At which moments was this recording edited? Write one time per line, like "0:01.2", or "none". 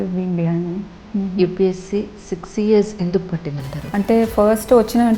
0:01.0
0:03.8